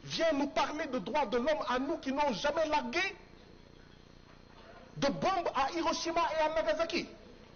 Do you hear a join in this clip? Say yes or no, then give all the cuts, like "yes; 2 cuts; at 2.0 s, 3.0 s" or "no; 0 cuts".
no; 0 cuts